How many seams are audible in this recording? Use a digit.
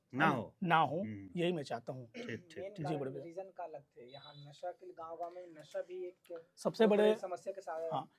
0